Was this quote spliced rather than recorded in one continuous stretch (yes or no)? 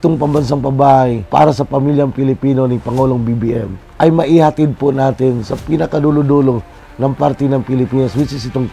yes